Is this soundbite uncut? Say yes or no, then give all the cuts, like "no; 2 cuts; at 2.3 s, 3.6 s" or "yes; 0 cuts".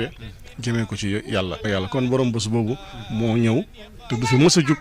no; 1 cut; at 1.6 s